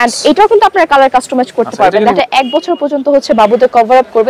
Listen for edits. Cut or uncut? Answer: cut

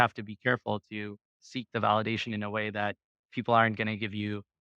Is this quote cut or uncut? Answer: uncut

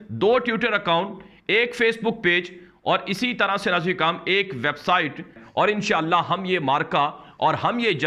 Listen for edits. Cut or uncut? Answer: cut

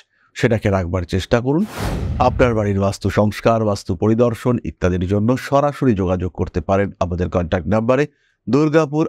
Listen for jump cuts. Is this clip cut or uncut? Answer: cut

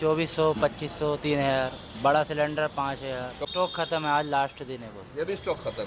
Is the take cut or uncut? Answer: cut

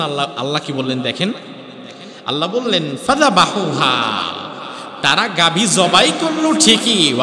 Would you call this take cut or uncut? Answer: uncut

